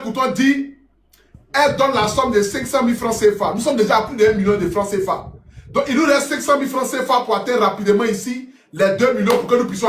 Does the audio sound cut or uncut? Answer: uncut